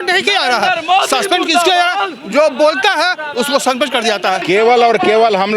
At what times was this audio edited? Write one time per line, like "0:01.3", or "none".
0:04.4